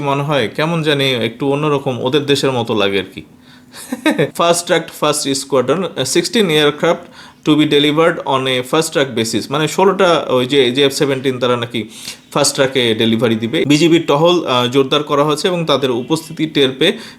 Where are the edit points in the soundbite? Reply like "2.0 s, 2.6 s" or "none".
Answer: 4.3 s, 13.6 s